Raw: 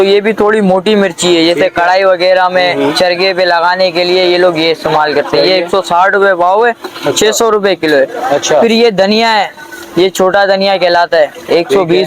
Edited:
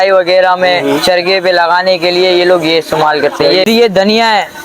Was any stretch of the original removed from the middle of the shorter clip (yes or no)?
yes